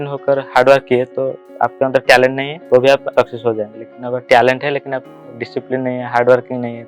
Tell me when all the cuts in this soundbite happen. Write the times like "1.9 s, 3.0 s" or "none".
1.4 s, 2.5 s, 3.1 s